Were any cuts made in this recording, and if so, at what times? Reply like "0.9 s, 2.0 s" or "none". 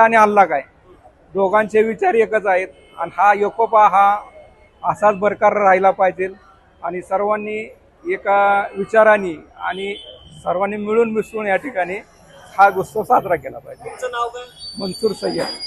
none